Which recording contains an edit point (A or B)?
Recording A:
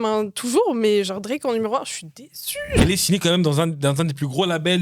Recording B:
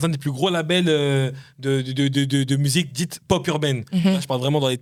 A